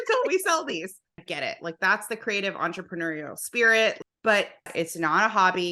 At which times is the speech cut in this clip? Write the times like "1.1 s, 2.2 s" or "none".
1.2 s, 4.1 s, 4.7 s